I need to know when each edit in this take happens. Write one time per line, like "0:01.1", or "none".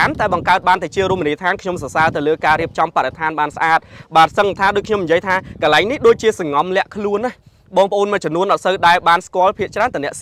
none